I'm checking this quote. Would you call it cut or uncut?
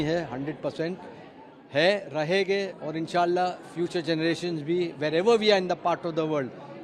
uncut